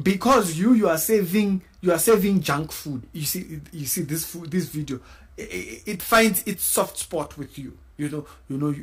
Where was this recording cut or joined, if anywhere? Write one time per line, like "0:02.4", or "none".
0:03.1